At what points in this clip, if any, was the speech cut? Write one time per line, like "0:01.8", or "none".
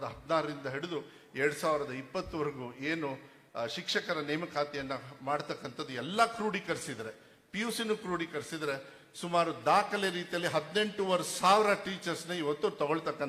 none